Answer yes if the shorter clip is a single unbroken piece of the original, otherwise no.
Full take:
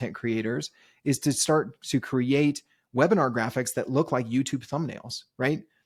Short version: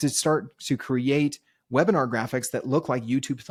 yes